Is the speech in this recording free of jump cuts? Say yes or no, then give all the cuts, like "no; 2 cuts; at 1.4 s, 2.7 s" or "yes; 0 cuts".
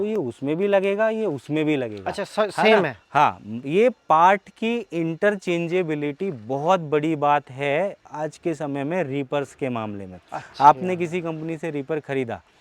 yes; 0 cuts